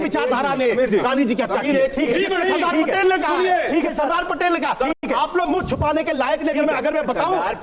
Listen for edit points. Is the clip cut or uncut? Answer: uncut